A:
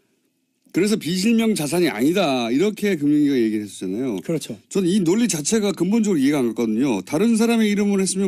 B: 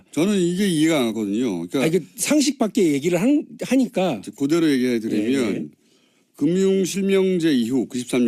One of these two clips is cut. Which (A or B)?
B